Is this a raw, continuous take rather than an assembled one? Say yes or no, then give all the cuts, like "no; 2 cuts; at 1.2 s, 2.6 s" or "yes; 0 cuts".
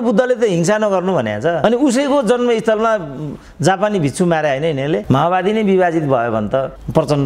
no; 1 cut; at 5.0 s